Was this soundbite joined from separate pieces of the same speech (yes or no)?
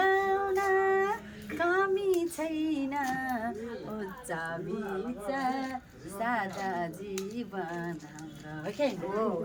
no